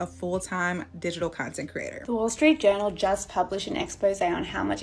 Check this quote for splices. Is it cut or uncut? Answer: cut